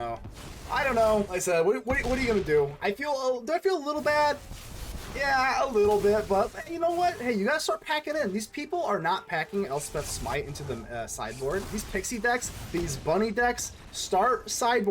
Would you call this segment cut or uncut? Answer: cut